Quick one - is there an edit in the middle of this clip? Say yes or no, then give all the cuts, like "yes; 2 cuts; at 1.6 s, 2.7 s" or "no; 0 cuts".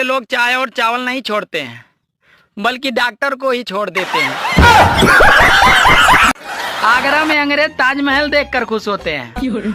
yes; 1 cut; at 6.5 s